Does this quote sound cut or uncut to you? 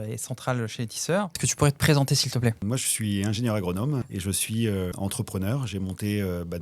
cut